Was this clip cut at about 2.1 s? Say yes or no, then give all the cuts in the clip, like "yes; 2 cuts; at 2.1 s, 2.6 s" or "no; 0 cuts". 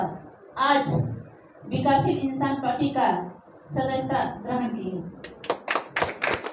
no; 0 cuts